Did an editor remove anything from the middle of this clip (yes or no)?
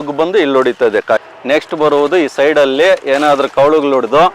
yes